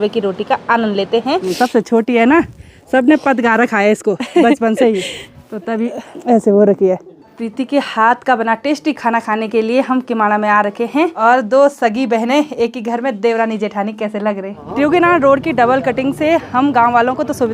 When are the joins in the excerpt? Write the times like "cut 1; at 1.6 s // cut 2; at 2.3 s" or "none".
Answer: cut 1; at 1.5 s // cut 2; at 7.4 s // cut 3; at 11.1 s // cut 4; at 14.6 s